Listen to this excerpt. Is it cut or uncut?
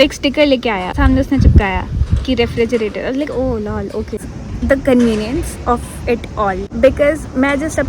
cut